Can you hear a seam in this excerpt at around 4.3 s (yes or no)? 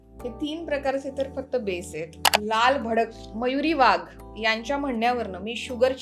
no